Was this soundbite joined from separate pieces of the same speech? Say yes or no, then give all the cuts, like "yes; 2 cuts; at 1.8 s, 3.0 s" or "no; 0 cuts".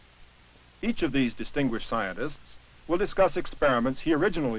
no; 0 cuts